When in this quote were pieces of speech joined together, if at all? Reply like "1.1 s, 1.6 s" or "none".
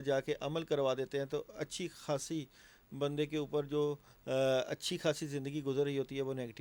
none

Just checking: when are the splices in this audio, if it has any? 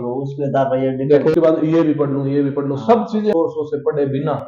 1.3 s, 3.3 s

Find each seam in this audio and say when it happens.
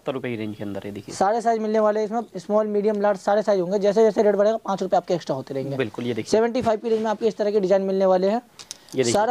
none

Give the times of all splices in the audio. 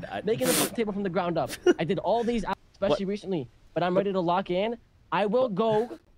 none

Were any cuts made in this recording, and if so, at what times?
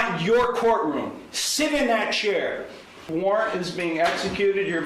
2.9 s

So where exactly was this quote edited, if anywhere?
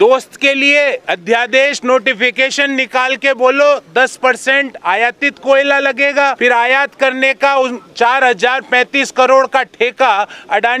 1.1 s, 6.4 s

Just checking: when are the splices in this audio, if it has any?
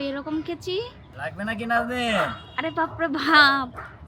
1.0 s

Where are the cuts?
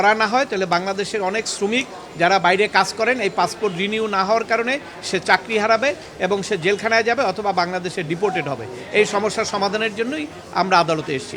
none

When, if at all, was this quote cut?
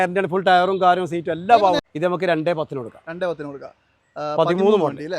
1.8 s

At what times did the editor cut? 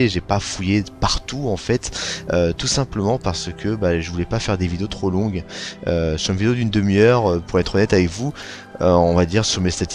8.2 s

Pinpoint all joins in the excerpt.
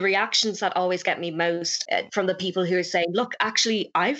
1.7 s

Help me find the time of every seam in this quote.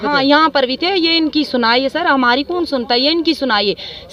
none

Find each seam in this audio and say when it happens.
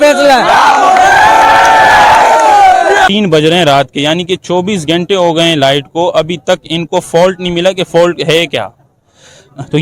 3.1 s

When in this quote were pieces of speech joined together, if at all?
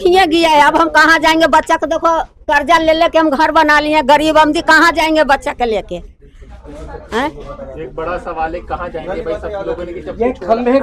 none

